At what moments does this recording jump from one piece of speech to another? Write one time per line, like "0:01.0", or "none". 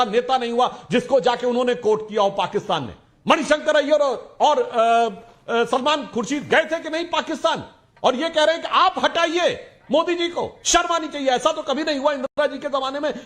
none